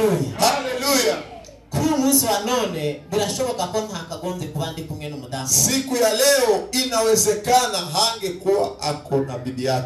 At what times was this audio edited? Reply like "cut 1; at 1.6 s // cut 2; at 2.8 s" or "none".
none

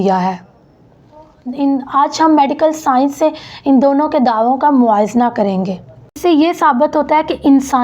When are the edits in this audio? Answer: cut 1; at 6.2 s

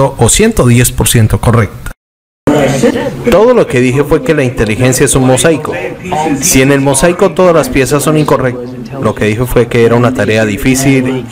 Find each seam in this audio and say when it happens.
cut 1; at 2.2 s

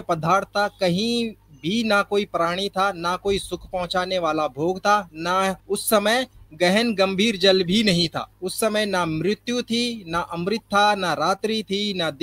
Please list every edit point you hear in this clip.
cut 1; at 5.6 s // cut 2; at 8.3 s

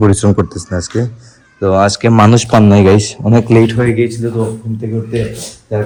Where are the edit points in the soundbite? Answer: none

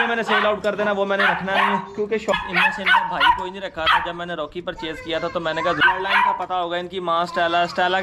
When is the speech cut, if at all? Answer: cut 1; at 2.3 s // cut 2; at 5.8 s

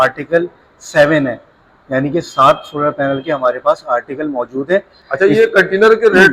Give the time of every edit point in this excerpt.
cut 1; at 5.0 s

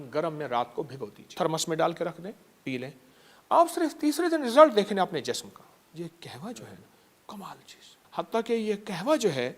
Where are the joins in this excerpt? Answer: cut 1; at 1.3 s // cut 2; at 5.9 s // cut 3; at 8.0 s

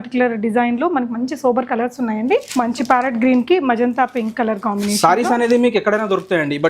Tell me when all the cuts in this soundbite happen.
cut 1; at 2.5 s

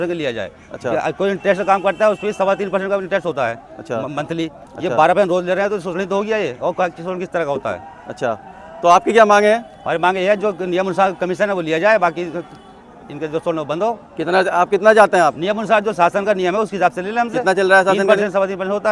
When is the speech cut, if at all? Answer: none

